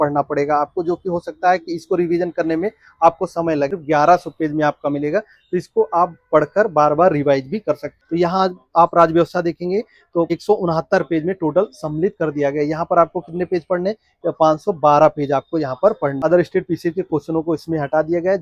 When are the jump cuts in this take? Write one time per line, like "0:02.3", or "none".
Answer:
0:03.7
0:07.9
0:10.4
0:16.2